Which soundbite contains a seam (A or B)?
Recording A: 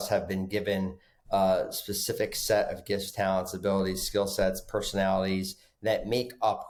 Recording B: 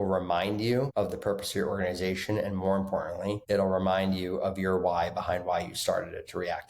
B